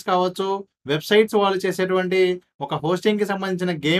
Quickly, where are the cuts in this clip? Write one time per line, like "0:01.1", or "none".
none

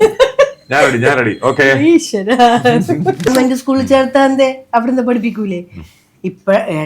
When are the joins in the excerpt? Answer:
0:03.3

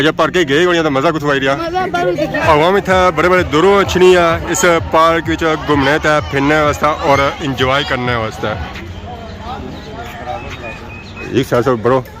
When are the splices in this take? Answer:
0:02.4
0:08.6
0:11.3

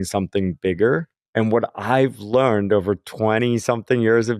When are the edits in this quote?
0:01.2

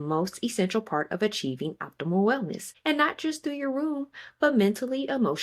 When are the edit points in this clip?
0:02.6

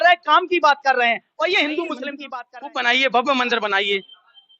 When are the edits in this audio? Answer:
0:02.2

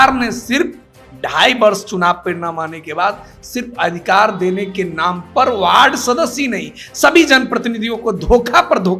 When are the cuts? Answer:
none

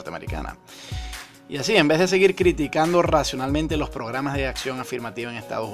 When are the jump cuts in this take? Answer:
none

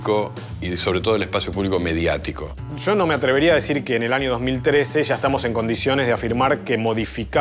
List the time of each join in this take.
0:02.6

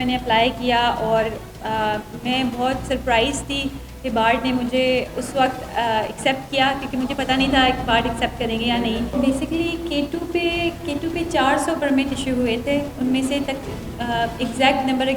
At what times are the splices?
0:09.1

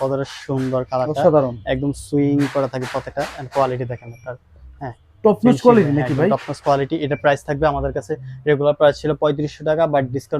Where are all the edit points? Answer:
none

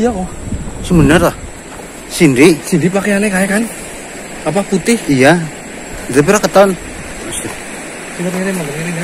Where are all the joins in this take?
none

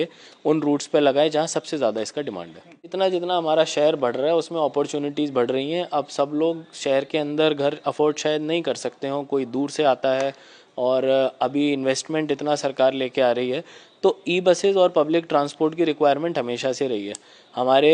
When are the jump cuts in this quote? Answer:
0:02.9

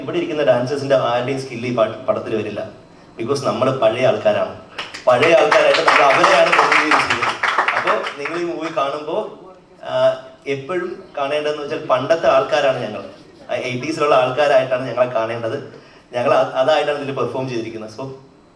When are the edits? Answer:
none

